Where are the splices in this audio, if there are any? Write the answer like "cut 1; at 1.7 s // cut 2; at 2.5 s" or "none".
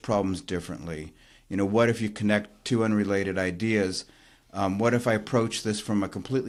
none